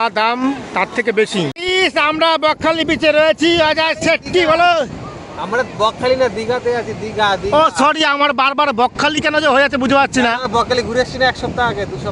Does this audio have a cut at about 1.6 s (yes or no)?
yes